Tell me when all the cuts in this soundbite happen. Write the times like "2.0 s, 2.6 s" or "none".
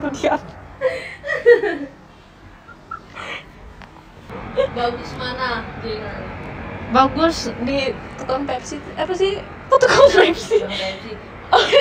4.4 s